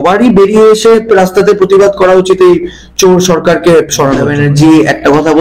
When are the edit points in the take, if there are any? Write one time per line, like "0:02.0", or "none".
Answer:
0:04.3